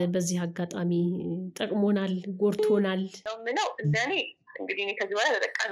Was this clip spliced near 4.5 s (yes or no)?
no